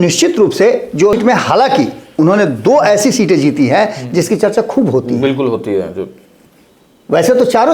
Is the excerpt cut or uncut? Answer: cut